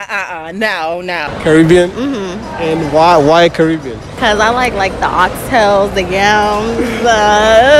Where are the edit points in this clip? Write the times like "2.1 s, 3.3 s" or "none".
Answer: 1.3 s, 4.0 s